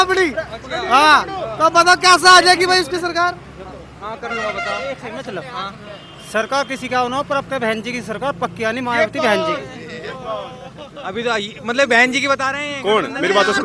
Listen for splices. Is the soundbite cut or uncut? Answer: uncut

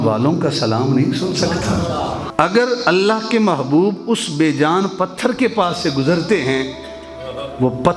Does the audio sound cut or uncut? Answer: cut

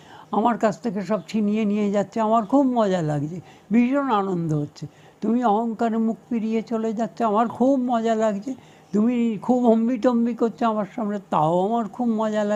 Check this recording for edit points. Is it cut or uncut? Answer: uncut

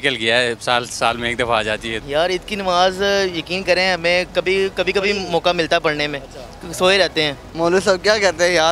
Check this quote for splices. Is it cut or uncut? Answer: cut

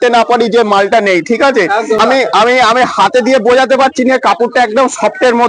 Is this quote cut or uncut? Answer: cut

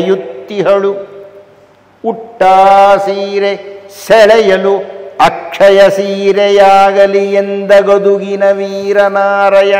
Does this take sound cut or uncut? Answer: uncut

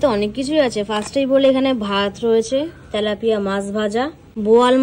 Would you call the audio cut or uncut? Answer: uncut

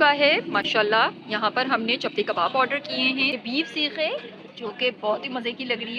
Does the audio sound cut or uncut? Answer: cut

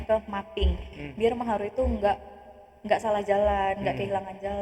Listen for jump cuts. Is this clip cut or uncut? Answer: uncut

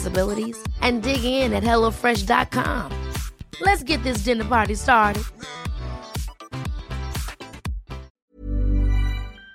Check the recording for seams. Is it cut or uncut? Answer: cut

